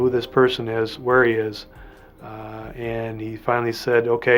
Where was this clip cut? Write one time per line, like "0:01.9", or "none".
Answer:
none